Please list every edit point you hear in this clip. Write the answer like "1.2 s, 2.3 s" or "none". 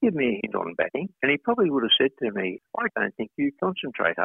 1.1 s, 2.6 s